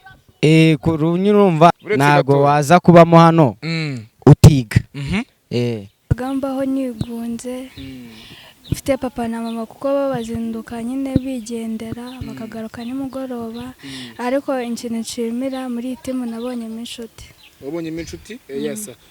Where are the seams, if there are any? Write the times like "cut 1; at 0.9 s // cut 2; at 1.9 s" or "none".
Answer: cut 1; at 1.7 s // cut 2; at 6.1 s